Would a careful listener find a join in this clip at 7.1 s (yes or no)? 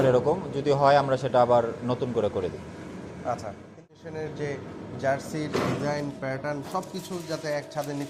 no